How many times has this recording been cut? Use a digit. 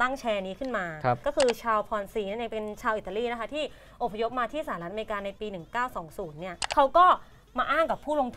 1